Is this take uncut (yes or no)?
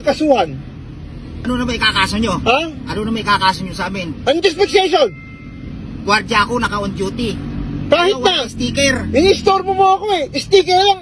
no